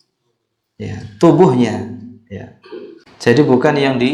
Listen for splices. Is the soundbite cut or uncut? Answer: cut